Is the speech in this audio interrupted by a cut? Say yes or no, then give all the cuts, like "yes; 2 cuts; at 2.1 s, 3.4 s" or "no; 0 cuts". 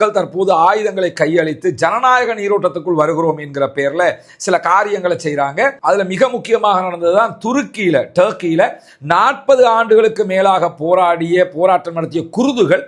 no; 0 cuts